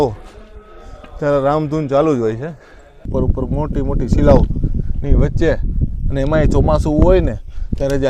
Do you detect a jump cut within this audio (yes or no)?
yes